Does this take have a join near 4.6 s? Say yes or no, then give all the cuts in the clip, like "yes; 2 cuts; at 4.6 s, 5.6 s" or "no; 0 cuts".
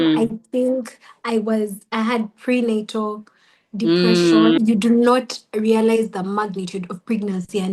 yes; 1 cut; at 4.6 s